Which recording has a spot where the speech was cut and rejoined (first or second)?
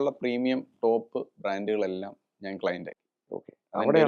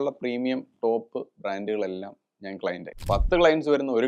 second